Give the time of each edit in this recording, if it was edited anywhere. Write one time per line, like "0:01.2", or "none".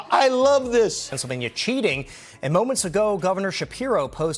0:01.1